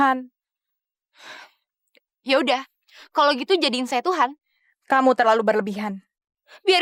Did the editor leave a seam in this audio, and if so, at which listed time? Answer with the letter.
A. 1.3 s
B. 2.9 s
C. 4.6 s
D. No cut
D